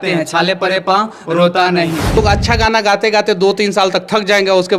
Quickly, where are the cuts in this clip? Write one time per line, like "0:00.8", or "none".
0:02.2